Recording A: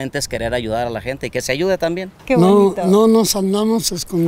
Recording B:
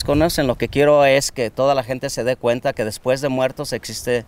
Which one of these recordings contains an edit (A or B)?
A